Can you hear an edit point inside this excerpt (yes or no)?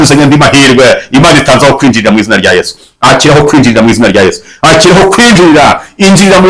no